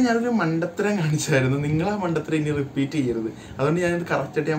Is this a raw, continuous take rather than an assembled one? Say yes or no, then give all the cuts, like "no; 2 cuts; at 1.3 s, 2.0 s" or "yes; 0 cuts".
yes; 0 cuts